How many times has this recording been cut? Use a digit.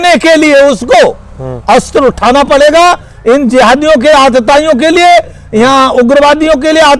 0